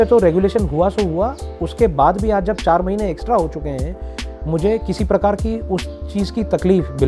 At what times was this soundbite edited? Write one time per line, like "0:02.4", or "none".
none